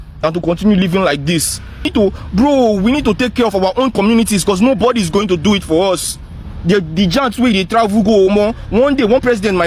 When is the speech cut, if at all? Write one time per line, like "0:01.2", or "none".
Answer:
0:01.9